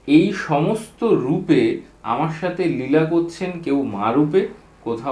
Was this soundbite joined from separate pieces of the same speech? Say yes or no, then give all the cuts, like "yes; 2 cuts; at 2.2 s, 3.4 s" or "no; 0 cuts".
no; 0 cuts